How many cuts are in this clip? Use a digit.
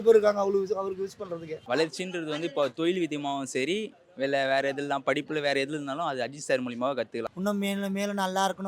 2